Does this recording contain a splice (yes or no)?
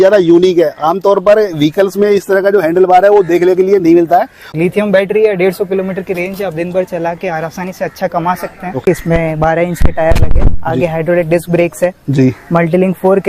yes